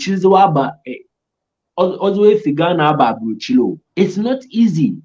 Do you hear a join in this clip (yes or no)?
yes